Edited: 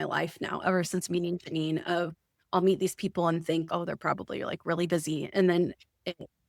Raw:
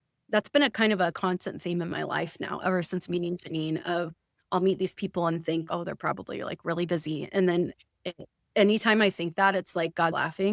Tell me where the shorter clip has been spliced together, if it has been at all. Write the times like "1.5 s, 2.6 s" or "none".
none